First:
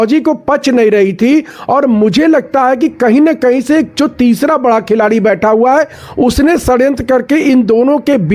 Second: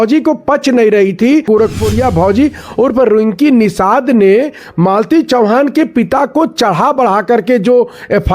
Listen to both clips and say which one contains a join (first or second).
second